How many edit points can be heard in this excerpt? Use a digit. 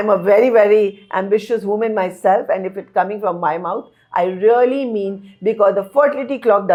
0